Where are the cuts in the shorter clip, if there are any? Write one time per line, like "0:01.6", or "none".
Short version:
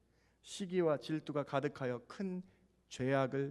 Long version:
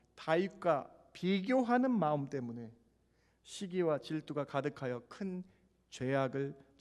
none